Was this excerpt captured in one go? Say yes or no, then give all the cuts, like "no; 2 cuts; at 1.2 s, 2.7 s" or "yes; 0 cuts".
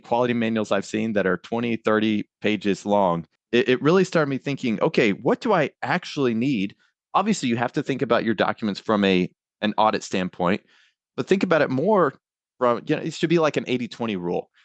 no; 1 cut; at 3.3 s